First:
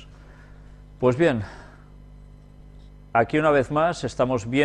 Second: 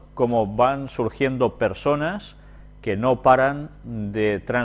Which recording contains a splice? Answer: first; 1 cut; at 1.0 s

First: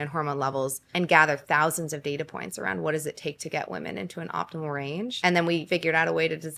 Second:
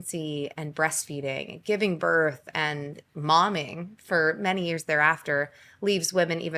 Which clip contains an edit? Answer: first; 3 cuts; at 0.8 s, 5.1 s, 5.6 s

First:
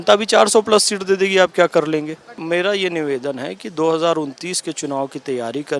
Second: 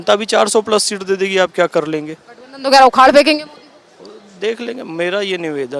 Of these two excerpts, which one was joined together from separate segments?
first; 1 cut; at 2.3 s

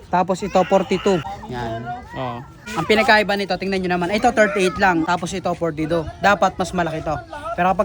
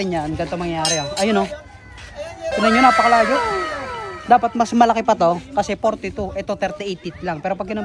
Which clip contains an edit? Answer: first; 3 cuts; at 1.3 s, 2.5 s, 5.1 s

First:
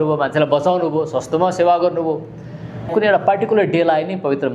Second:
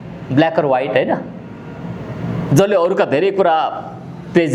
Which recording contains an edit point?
first; 1 cut; at 2.9 s

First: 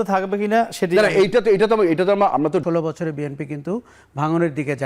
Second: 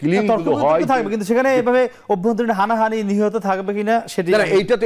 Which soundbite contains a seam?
first; 1 cut; at 2.6 s

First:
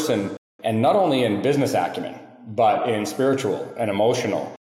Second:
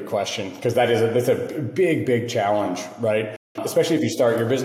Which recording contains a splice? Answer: second; 1 cut; at 3.6 s

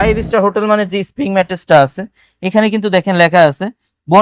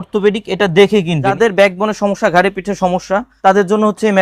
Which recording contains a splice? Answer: second; 2 cuts; at 1.3 s, 3.3 s

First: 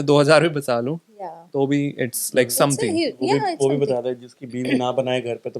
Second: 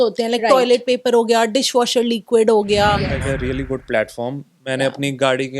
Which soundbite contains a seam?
second; 1 cut; at 3.1 s

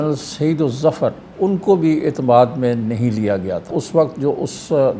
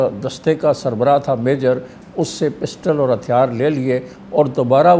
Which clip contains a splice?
first; 2 cuts; at 1.2 s, 3.7 s

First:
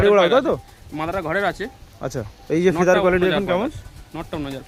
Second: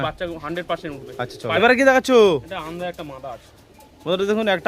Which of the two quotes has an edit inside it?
second; 1 cut; at 1.5 s

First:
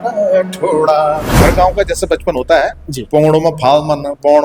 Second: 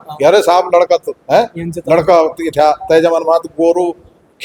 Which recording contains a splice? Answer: first; 1 cut; at 1.4 s

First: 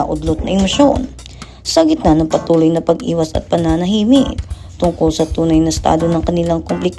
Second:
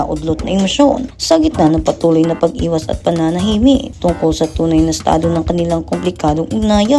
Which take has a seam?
second; 2 cuts; at 1.1 s, 4.2 s

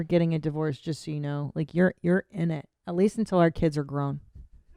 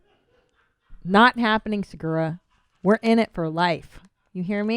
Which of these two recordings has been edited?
second; 1 cut; at 1.4 s

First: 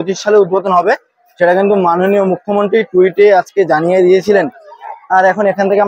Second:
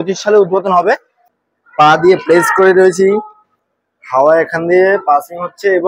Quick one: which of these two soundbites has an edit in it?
second; 1 cut; at 1.2 s

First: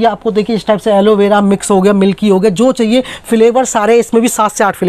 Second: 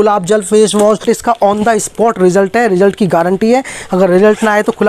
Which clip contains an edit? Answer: second; 1 cut; at 1.0 s

